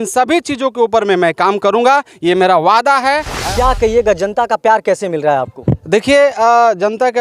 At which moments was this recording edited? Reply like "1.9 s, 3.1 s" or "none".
3.3 s